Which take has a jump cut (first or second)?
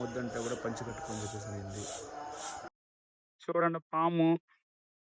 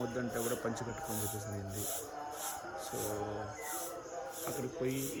first